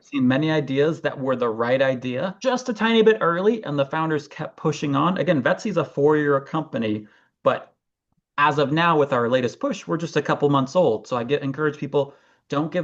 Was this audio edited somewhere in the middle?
yes; 1 cut; at 2.4 s

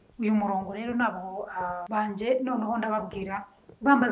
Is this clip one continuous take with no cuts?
no; 1 cut; at 1.8 s

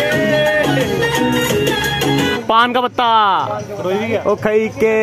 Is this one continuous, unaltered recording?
no; 2 cuts; at 2.4 s, 4.2 s

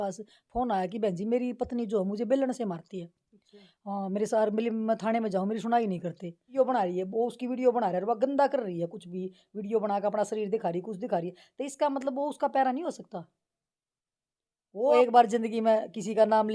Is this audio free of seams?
no; 2 cuts; at 6.4 s, 14.9 s

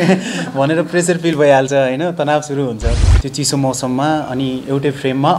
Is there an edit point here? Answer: yes; 1 cut; at 2.9 s

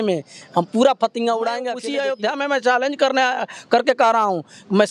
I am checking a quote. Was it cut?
yes; 1 cut; at 1.8 s

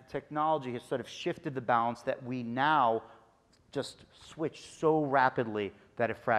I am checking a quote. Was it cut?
no; 0 cuts

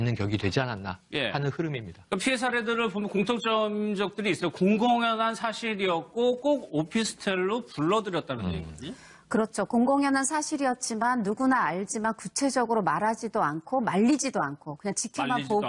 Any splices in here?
no; 0 cuts

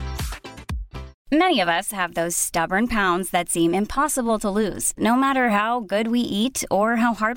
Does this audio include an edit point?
yes; 1 cut; at 1.1 s

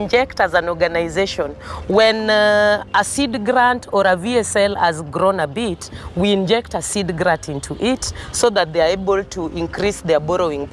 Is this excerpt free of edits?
yes; 0 cuts

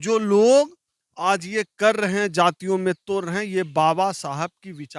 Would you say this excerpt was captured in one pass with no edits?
yes; 0 cuts

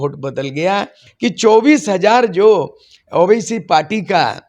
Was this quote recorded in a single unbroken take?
no; 1 cut; at 1.0 s

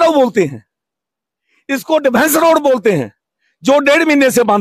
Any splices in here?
no; 0 cuts

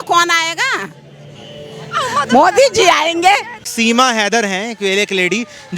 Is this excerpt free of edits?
no; 1 cut; at 3.6 s

